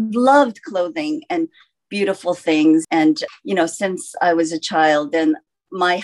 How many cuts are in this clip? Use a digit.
1